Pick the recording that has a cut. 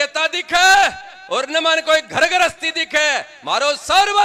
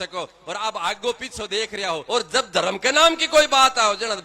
second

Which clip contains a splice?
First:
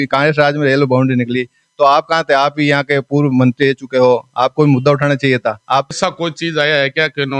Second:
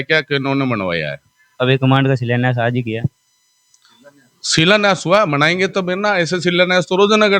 first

